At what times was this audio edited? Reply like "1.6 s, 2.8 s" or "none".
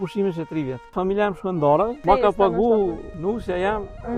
0.9 s, 2.0 s, 3.1 s